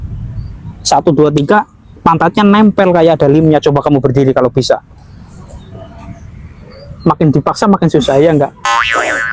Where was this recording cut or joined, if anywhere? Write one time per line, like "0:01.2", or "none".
none